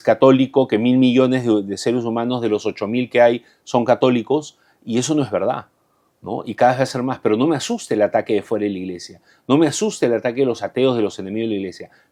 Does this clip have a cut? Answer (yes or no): no